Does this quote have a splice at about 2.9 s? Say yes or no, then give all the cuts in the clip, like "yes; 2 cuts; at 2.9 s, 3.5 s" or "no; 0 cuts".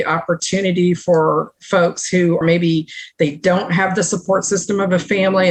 no; 0 cuts